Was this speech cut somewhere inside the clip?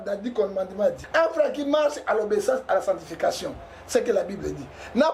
yes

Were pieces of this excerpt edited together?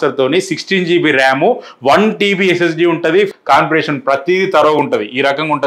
yes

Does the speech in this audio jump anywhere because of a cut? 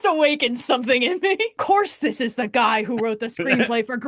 yes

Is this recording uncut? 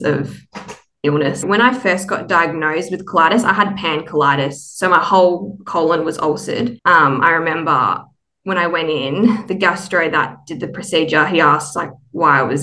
no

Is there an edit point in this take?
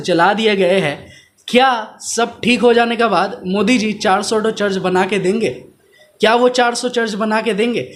no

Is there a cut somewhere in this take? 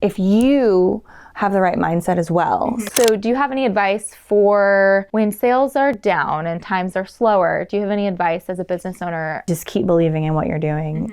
yes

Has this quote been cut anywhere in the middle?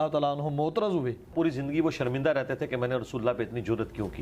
yes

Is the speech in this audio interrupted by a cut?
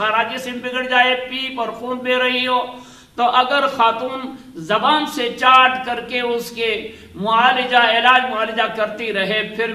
no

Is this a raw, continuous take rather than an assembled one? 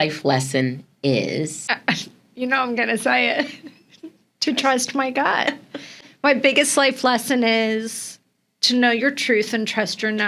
no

